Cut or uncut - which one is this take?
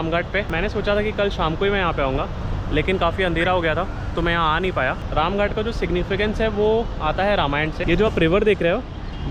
uncut